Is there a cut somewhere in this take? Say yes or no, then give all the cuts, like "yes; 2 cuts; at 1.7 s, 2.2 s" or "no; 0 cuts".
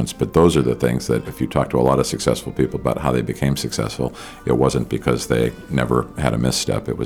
yes; 1 cut; at 1.3 s